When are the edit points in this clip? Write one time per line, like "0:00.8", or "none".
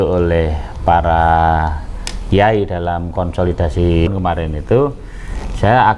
0:04.1